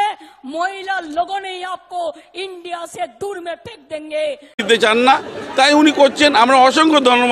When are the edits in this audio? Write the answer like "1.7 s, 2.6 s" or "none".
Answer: none